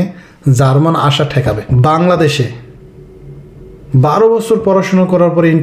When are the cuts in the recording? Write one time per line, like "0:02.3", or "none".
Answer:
0:01.7